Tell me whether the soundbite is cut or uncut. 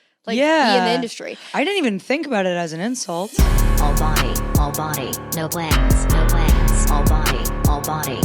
cut